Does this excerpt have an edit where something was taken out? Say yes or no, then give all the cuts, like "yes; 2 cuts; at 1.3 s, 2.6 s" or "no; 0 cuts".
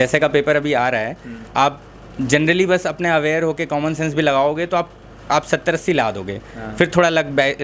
no; 0 cuts